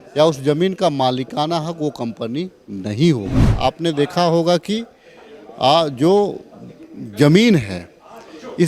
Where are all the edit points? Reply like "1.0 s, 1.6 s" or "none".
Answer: 3.5 s